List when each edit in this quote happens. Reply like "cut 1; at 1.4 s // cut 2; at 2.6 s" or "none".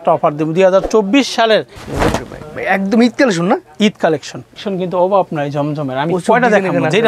cut 1; at 1.7 s // cut 2; at 4.7 s